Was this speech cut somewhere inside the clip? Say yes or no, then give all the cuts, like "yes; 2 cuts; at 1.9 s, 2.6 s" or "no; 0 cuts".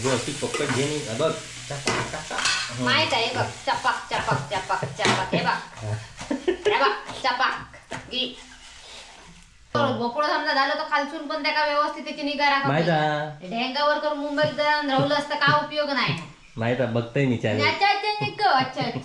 yes; 1 cut; at 9.7 s